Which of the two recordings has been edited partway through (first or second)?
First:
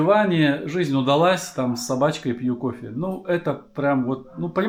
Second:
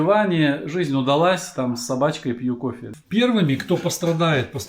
second